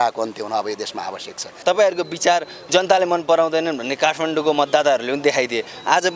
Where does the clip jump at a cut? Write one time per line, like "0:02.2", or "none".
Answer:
0:01.6